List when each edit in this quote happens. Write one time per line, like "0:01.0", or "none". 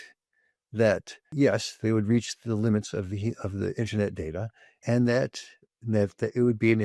0:01.2
0:04.8